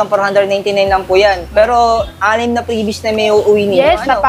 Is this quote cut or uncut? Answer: uncut